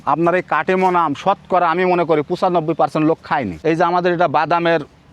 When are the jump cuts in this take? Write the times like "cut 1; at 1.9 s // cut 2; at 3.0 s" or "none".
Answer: cut 1; at 3.5 s